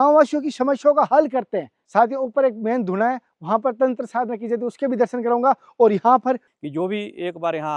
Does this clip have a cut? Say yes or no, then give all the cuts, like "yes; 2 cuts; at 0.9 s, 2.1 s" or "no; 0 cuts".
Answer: yes; 2 cuts; at 1.8 s, 6.5 s